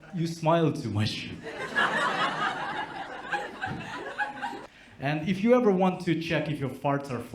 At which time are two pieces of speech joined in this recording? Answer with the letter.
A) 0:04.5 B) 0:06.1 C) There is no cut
A